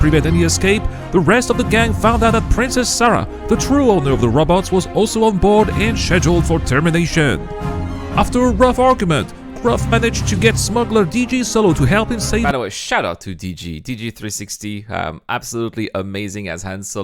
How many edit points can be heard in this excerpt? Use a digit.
0